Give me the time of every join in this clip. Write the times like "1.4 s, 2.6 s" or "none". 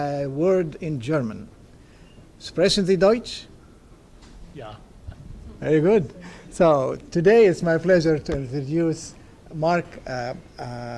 none